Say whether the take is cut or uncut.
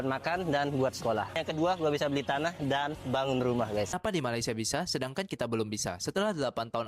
cut